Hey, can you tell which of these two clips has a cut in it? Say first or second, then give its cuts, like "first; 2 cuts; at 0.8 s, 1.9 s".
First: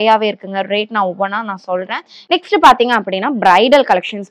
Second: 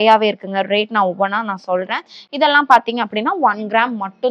first; 1 cut; at 2.3 s